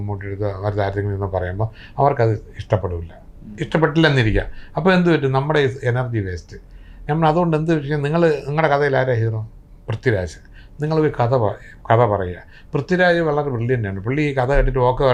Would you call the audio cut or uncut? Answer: uncut